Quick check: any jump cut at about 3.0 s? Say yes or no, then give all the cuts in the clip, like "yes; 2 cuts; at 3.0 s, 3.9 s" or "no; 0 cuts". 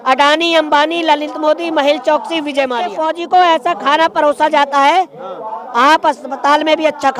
yes; 1 cut; at 3.0 s